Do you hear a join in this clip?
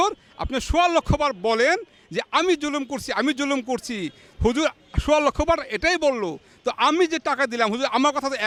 no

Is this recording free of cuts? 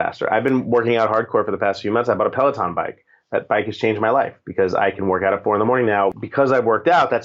no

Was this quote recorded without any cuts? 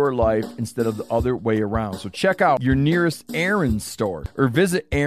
no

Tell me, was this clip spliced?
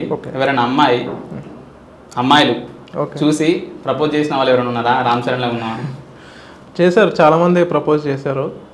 no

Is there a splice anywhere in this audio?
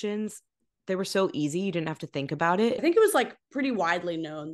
yes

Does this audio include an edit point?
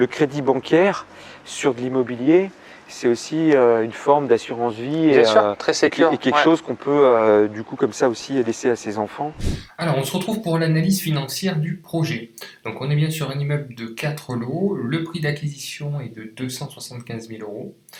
yes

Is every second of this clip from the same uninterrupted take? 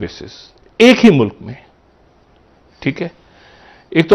yes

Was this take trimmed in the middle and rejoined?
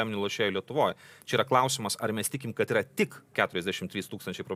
no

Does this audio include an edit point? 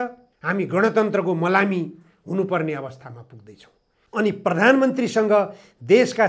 yes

